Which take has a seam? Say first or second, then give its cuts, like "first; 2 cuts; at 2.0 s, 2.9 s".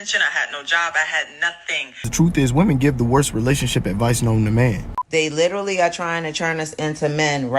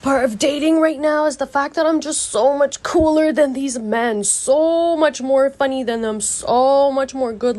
first; 2 cuts; at 2.1 s, 4.9 s